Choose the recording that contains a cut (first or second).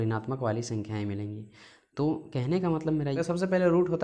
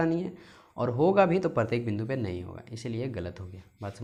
first